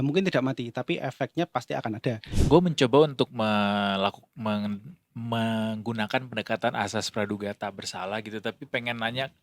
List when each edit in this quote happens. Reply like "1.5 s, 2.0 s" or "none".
2.3 s